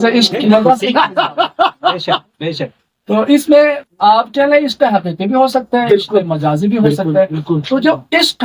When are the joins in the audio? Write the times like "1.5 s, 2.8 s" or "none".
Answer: none